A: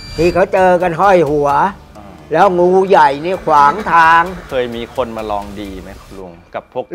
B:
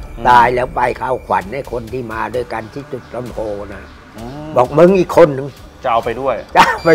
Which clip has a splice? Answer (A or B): A